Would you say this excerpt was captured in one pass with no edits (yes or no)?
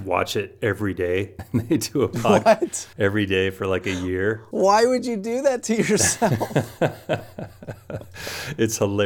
no